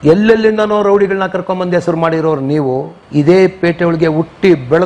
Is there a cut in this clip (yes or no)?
no